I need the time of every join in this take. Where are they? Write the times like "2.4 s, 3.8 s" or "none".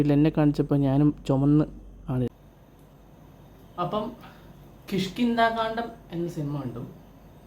2.3 s

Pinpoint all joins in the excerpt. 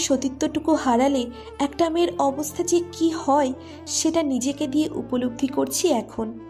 none

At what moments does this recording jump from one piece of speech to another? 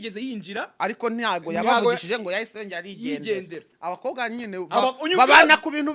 3.7 s

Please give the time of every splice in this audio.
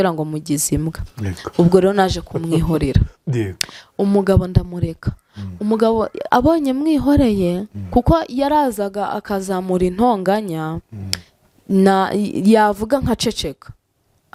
none

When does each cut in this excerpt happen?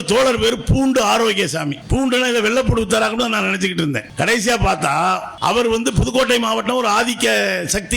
1.8 s, 4.1 s, 5.3 s

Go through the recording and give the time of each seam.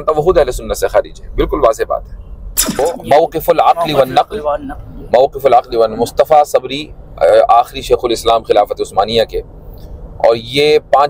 2.8 s

